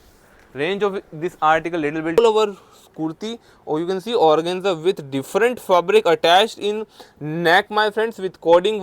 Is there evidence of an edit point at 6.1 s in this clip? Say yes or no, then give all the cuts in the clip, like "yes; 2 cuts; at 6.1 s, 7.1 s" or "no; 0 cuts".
no; 1 cut; at 2.2 s